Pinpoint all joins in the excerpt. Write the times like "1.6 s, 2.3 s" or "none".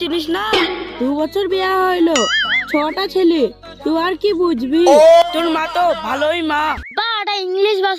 6.9 s